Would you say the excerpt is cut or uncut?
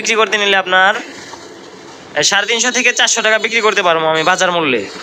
uncut